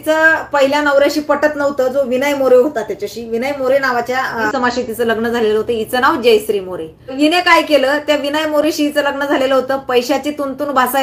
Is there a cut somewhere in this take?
yes; 2 cuts; at 4.5 s, 7.1 s

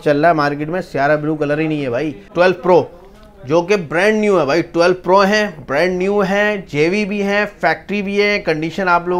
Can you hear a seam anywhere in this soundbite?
yes; 1 cut; at 2.2 s

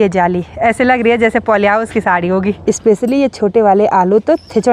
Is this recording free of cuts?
no; 1 cut; at 2.6 s

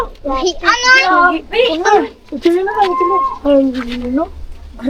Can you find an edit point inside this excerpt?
no; 0 cuts

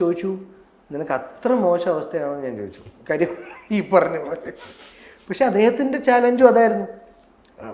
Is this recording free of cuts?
yes; 0 cuts

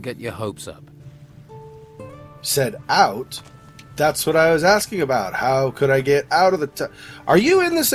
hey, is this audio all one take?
no; 1 cut; at 2.5 s

